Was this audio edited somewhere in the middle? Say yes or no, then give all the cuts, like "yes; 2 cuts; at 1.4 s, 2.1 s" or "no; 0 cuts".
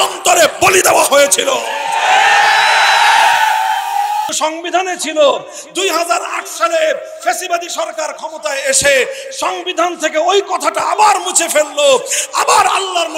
yes; 1 cut; at 4.3 s